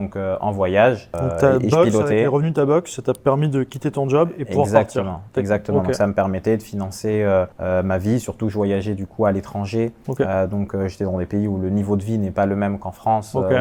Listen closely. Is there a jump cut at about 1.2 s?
no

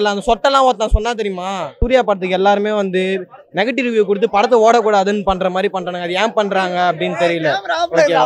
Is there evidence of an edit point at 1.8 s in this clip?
yes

